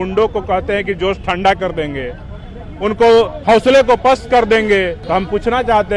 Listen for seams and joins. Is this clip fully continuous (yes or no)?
no